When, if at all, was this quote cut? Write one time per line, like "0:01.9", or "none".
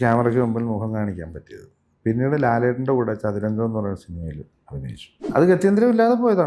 0:05.2